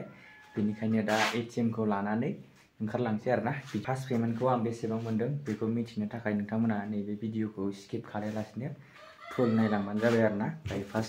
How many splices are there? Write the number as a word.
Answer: one